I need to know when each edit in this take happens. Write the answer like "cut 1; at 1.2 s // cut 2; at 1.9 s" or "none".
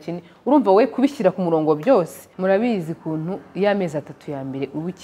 cut 1; at 2.2 s